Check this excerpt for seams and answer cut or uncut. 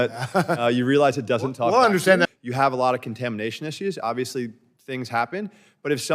cut